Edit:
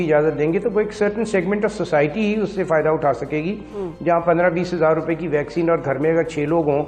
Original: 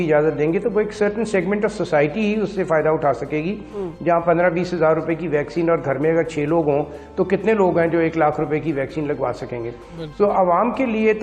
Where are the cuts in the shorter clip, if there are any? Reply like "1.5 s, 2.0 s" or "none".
none